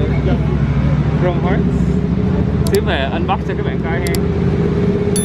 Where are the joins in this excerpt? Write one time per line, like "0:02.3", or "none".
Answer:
none